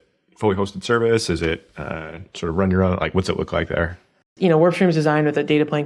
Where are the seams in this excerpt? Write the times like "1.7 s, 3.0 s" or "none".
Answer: 4.3 s

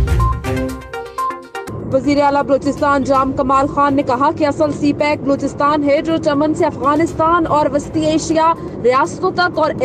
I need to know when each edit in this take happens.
1.6 s

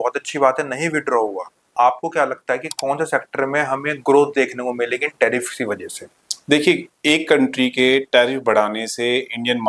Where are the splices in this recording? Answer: 1.6 s

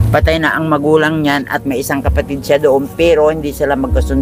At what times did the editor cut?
none

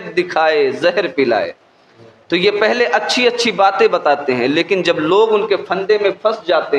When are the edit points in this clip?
none

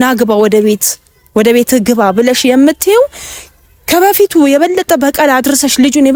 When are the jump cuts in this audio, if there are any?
none

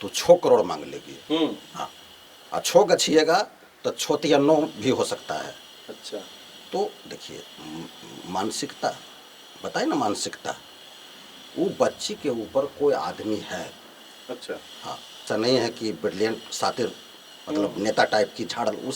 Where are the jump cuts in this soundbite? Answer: 15.2 s

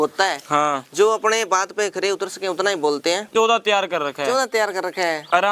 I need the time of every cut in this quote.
3.3 s

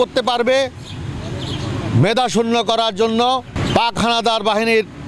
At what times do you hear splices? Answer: 3.6 s

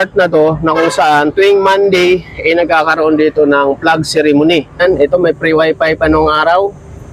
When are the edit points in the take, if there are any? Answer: 4.8 s

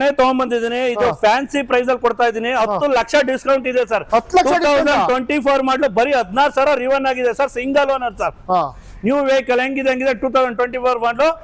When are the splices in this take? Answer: none

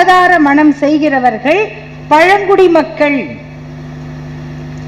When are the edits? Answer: none

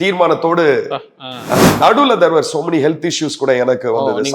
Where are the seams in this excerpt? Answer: 1.6 s

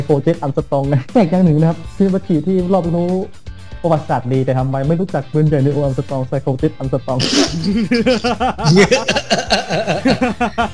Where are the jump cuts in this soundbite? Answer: 1.0 s, 1.8 s

